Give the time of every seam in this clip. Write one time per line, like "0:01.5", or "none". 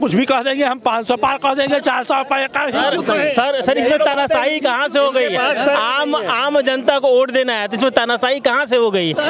none